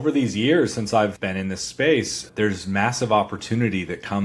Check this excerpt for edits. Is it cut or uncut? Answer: cut